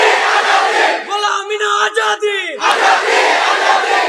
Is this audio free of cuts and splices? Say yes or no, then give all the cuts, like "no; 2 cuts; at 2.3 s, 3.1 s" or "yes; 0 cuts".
yes; 0 cuts